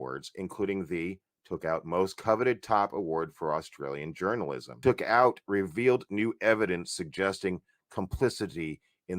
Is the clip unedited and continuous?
no; 1 cut; at 4.7 s

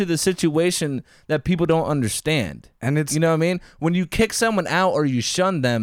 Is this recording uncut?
yes; 0 cuts

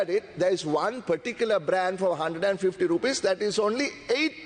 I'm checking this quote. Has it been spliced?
no; 0 cuts

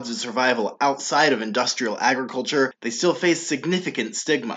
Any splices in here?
no; 0 cuts

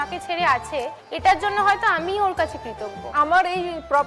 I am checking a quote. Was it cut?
yes; 1 cut; at 3.0 s

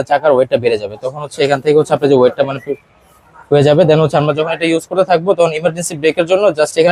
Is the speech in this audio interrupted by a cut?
no; 0 cuts

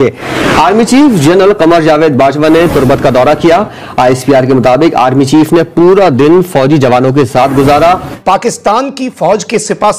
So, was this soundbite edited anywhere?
yes; 1 cut; at 8.1 s

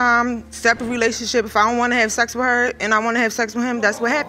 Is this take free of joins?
yes; 0 cuts

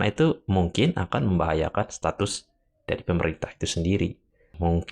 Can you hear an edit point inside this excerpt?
no; 0 cuts

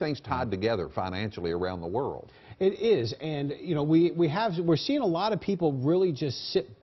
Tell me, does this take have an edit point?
no; 0 cuts

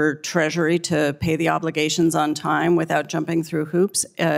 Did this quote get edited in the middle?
no; 0 cuts

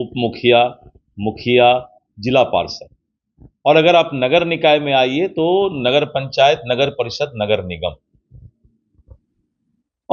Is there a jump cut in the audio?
no; 0 cuts

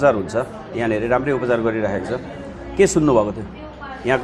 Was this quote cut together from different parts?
no; 0 cuts

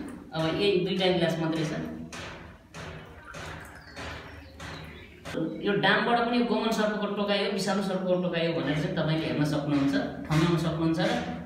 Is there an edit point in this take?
yes; 1 cut; at 5.3 s

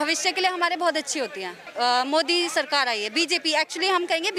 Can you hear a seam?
yes; 1 cut; at 1.6 s

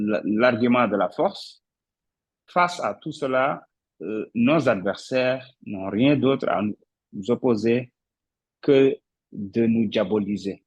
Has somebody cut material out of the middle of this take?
no; 0 cuts

